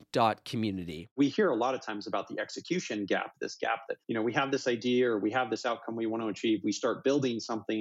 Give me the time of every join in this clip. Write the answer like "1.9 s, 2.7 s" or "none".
1.2 s